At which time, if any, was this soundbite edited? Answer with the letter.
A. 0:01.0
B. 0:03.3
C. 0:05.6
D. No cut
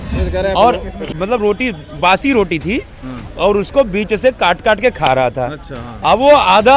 A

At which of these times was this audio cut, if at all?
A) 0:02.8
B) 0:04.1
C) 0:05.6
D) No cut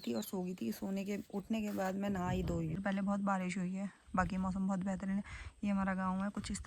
A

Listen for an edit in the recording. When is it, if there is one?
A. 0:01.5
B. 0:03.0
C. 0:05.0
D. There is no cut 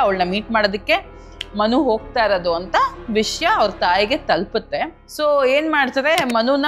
C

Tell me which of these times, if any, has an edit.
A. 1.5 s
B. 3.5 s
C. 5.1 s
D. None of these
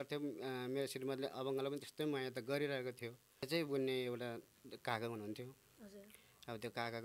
B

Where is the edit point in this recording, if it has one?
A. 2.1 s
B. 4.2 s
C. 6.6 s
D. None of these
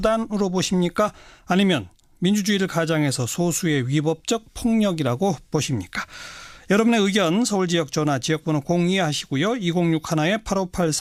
D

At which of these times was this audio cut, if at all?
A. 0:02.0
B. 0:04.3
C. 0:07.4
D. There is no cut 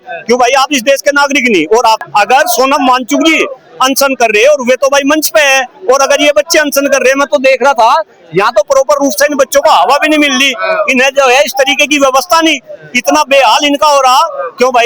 A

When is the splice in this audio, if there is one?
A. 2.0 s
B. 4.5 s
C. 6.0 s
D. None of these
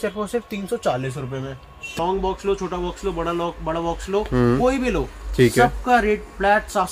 A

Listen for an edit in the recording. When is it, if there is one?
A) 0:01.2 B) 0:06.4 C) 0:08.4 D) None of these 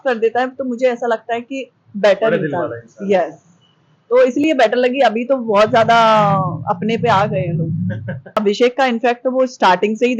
C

